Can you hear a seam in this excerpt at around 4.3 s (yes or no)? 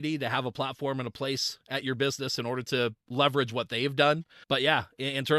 yes